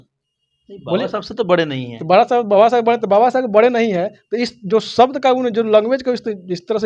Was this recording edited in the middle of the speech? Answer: no; 0 cuts

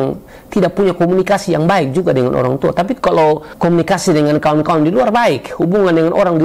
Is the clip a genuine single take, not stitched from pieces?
no; 1 cut; at 3.1 s

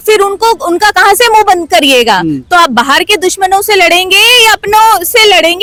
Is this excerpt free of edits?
yes; 0 cuts

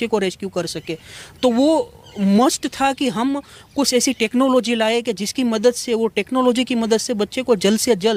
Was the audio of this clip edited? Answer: no; 0 cuts

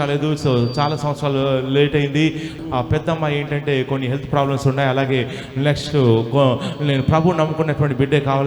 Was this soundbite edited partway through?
yes; 1 cut; at 2.5 s

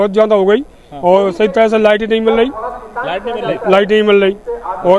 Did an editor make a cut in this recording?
no; 0 cuts

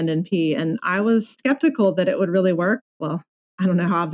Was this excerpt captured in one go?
no; 2 cuts; at 1.4 s, 2.8 s

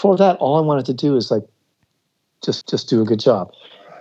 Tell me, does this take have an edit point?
no; 0 cuts

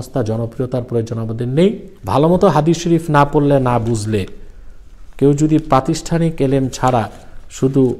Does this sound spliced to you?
yes; 1 cut; at 1.9 s

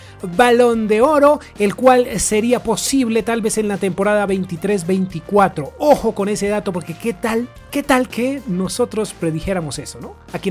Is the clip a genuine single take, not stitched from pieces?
yes; 0 cuts

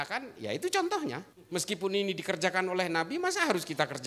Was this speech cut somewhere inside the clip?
yes; 1 cut; at 1.3 s

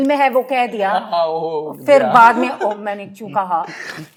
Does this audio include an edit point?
no; 0 cuts

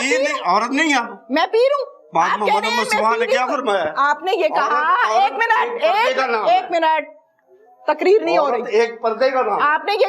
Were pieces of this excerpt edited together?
no; 0 cuts

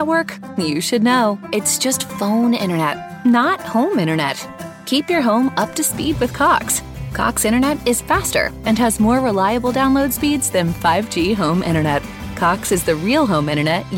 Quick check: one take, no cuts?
yes; 0 cuts

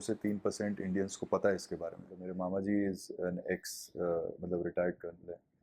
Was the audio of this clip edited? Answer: yes; 1 cut; at 2.3 s

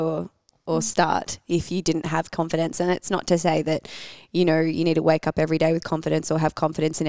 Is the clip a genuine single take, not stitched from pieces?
yes; 0 cuts

